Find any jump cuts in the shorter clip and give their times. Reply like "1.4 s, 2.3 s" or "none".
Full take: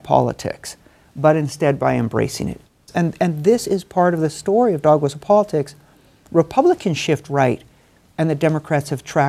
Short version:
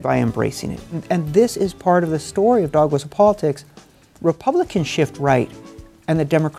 1.0 s